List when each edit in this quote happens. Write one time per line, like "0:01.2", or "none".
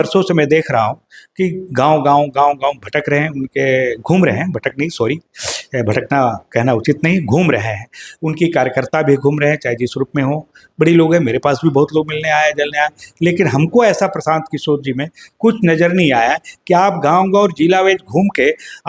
none